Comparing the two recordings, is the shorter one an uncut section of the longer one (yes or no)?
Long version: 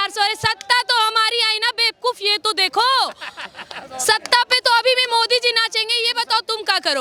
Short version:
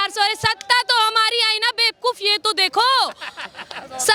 yes